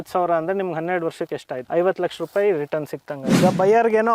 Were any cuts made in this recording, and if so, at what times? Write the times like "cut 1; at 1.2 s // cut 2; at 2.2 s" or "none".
cut 1; at 1.6 s // cut 2; at 3.4 s